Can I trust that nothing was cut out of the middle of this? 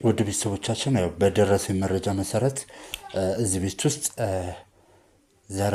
yes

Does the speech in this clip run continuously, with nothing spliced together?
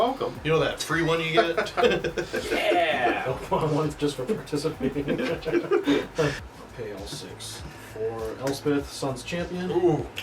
no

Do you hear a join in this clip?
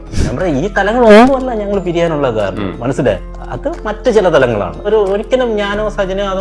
no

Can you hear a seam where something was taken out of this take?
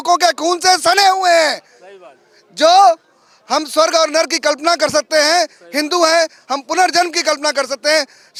no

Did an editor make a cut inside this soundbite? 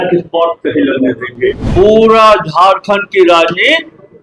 yes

